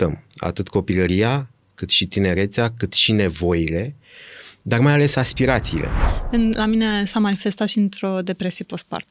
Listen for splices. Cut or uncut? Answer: cut